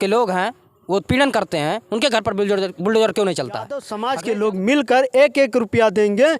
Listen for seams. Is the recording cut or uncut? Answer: cut